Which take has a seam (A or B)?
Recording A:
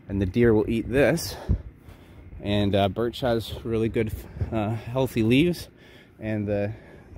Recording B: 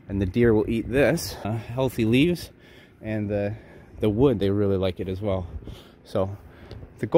B